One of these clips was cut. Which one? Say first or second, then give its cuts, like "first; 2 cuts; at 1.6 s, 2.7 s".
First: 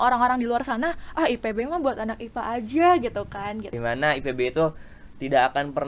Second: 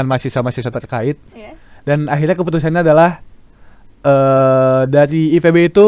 first; 1 cut; at 3.7 s